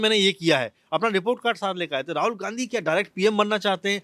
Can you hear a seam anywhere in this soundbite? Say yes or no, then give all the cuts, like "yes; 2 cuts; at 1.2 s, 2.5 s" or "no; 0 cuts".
no; 0 cuts